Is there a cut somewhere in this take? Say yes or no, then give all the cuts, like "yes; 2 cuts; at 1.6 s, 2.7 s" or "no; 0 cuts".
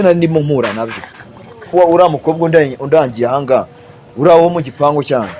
yes; 1 cut; at 1.7 s